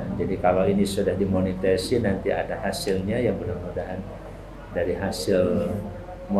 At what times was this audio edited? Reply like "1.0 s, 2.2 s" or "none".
none